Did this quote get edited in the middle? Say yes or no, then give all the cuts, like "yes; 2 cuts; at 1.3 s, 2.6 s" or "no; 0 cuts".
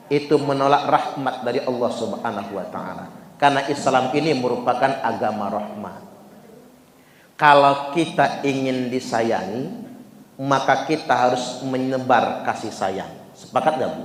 no; 0 cuts